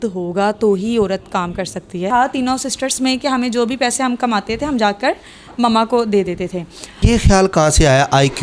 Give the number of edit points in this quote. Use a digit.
2